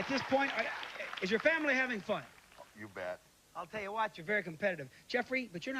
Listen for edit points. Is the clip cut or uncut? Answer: cut